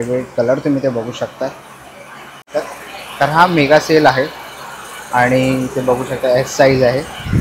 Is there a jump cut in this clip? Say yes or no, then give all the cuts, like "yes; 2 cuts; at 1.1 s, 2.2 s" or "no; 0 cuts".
yes; 1 cut; at 2.5 s